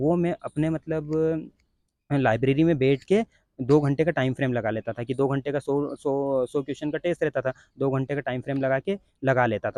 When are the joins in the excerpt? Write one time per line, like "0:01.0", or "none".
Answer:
none